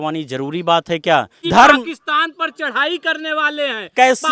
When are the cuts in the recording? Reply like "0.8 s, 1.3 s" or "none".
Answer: 1.4 s